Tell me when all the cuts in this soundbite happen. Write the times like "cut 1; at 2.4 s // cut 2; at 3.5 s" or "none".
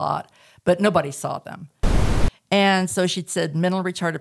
cut 1; at 2.0 s